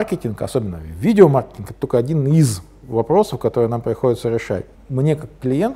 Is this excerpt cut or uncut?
cut